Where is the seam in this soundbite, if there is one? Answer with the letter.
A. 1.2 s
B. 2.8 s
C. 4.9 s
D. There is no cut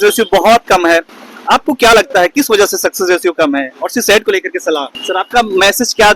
C